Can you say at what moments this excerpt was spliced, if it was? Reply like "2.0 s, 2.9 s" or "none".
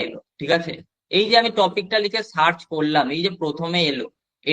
none